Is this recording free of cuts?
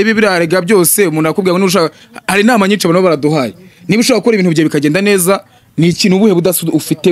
yes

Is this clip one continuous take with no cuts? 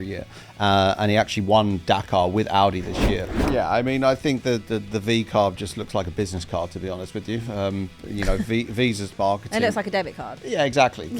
no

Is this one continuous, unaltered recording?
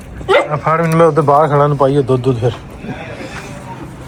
yes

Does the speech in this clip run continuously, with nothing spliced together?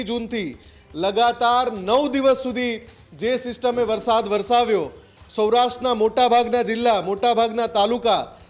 yes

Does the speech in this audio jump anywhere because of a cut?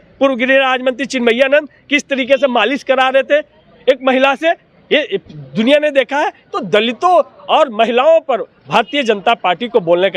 no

